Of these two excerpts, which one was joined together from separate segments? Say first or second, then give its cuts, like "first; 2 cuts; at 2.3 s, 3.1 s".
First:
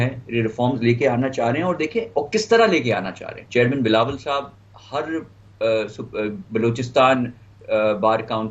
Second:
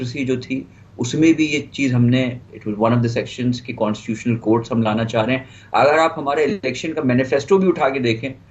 first; 1 cut; at 3.3 s